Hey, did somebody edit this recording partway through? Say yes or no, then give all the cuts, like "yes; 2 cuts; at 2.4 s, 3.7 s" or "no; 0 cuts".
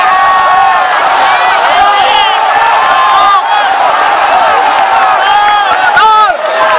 no; 0 cuts